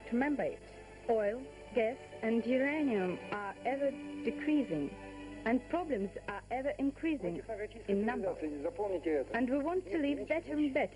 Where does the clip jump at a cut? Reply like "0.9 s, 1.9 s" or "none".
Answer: 8.3 s